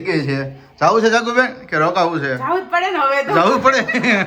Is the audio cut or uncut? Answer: uncut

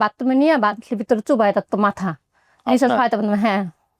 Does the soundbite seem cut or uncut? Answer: uncut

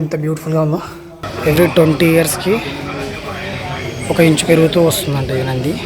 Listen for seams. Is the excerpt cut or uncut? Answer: cut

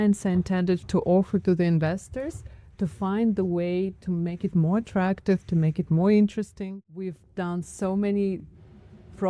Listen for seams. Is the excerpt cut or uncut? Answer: cut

